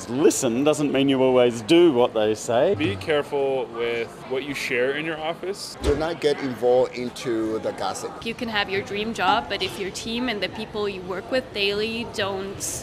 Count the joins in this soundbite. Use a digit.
3